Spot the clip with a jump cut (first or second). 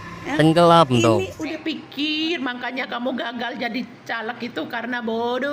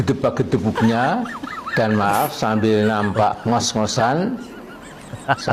first